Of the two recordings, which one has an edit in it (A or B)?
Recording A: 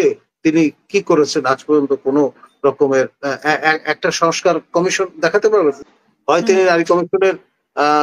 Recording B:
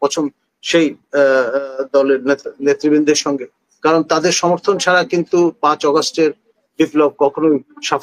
A